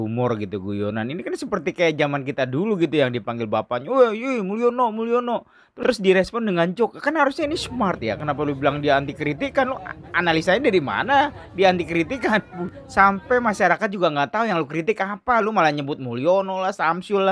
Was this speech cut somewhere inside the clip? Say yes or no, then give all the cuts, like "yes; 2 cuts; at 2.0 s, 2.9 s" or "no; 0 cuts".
no; 0 cuts